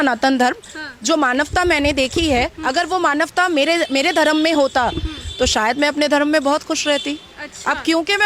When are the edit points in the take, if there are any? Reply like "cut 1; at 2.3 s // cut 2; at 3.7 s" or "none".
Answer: none